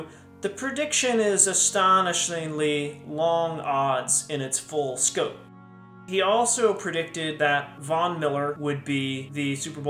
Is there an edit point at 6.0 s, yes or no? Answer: yes